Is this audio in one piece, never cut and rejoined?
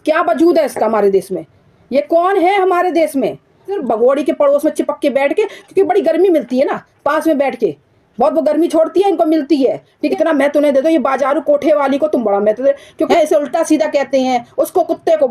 no; 3 cuts; at 3.7 s, 10.0 s, 13.1 s

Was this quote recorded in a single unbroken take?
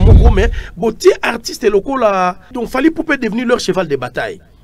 no; 1 cut; at 2.5 s

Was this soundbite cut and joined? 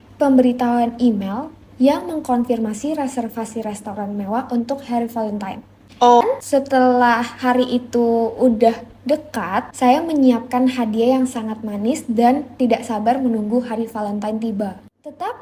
yes; 1 cut; at 6.2 s

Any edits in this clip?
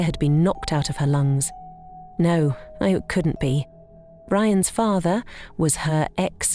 no; 0 cuts

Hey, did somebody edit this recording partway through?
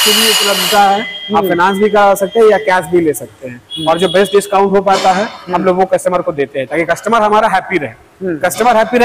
no; 0 cuts

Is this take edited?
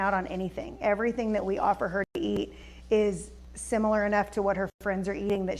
no; 0 cuts

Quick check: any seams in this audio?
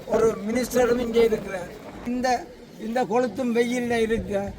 yes; 1 cut; at 2.1 s

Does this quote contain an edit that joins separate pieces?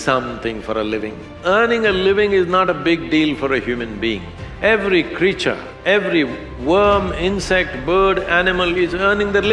yes; 1 cut; at 1.3 s

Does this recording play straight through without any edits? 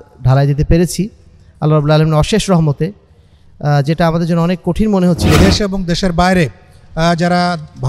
no; 1 cut; at 5.4 s

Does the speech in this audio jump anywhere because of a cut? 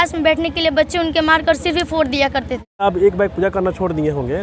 yes; 1 cut; at 2.8 s

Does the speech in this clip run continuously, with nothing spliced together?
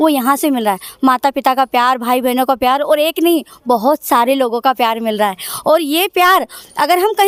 yes; 0 cuts

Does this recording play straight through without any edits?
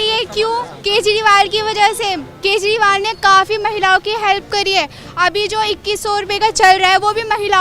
yes; 0 cuts

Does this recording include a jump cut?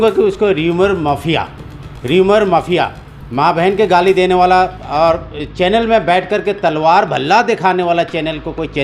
no; 0 cuts

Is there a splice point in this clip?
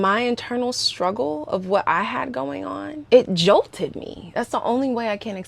yes; 1 cut; at 2.9 s

